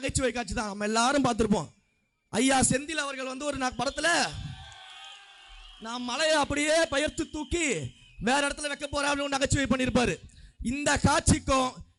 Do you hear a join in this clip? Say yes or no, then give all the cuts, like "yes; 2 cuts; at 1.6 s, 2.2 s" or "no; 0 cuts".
no; 0 cuts